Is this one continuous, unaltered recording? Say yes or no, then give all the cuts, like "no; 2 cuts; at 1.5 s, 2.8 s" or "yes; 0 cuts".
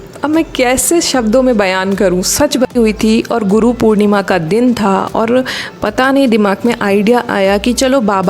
no; 1 cut; at 2.7 s